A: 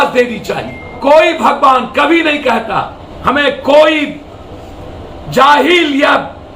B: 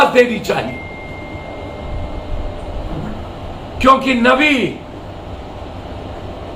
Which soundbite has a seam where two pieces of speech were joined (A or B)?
A